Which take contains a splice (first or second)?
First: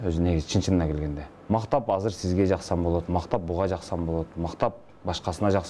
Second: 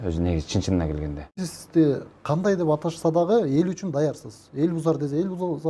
second